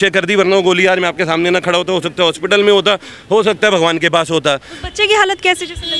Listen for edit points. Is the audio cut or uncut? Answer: uncut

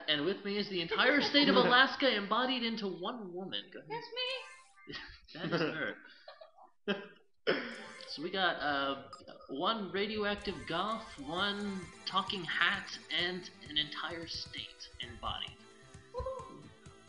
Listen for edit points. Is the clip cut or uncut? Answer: cut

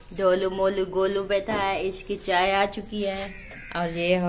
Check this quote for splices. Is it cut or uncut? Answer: uncut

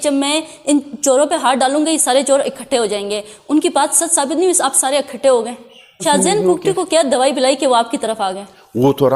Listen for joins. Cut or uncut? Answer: cut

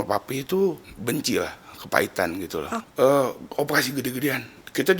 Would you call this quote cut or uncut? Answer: cut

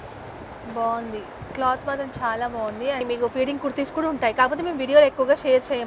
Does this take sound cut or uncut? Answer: cut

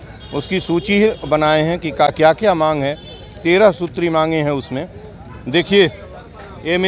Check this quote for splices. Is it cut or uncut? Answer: uncut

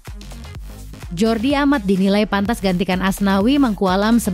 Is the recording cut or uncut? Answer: cut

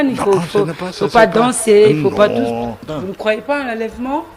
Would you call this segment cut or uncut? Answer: cut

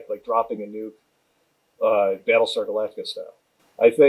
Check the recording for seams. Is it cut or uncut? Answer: uncut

